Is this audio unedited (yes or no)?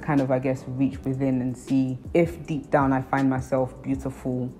yes